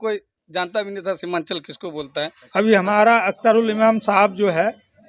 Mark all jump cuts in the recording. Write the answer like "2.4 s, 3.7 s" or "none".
2.4 s